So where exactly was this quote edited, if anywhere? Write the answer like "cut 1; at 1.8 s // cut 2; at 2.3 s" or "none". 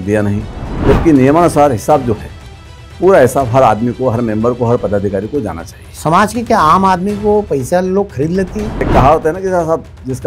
cut 1; at 8.9 s